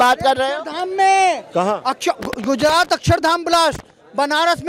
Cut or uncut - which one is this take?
uncut